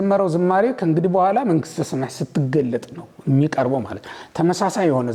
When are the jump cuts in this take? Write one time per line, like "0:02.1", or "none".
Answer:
none